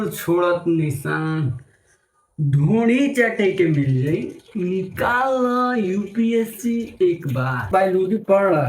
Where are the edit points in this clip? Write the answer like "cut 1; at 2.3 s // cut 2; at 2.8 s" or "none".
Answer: cut 1; at 7.7 s